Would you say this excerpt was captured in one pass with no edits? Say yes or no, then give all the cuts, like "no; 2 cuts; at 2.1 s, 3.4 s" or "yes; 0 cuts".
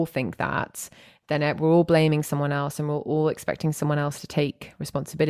yes; 0 cuts